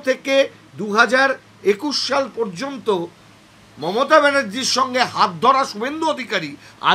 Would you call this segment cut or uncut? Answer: uncut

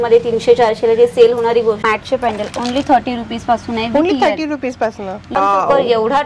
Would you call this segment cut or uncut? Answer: cut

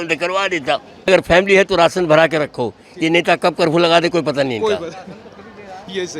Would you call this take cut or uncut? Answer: cut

